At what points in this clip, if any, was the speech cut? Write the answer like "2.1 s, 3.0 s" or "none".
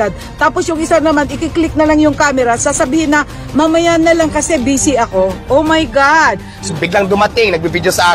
6.7 s